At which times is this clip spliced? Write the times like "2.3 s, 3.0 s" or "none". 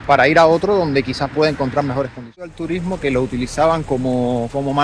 2.5 s

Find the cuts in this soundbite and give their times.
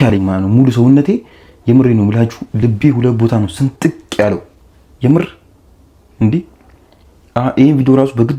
none

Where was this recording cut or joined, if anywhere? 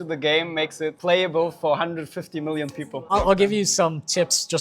1.0 s, 3.1 s

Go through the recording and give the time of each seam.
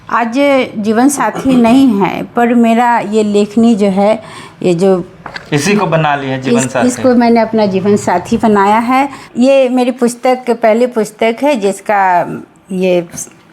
9.2 s

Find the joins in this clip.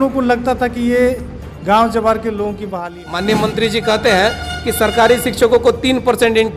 2.8 s

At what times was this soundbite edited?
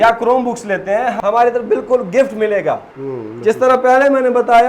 1.1 s, 2.9 s

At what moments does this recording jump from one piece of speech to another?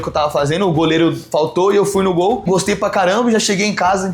2.5 s

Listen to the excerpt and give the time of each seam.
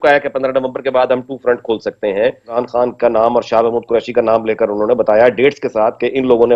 2.5 s

